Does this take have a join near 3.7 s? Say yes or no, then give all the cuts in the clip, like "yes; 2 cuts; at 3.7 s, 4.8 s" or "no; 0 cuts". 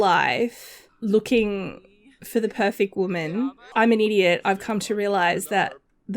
yes; 1 cut; at 3.7 s